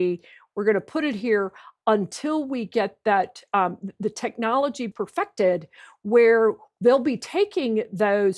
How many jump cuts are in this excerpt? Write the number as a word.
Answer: one